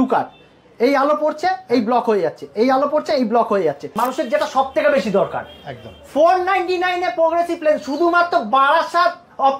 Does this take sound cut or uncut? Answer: cut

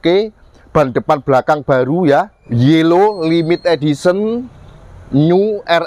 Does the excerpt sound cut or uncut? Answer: cut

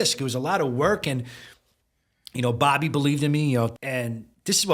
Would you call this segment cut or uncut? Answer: cut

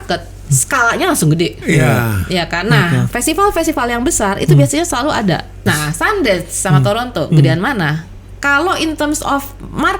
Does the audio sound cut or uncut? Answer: cut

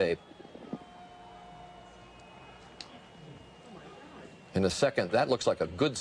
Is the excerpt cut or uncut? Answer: uncut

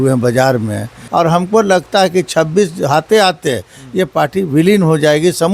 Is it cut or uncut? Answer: cut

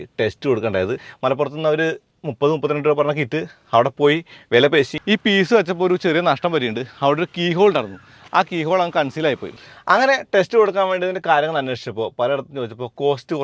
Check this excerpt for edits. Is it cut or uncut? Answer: cut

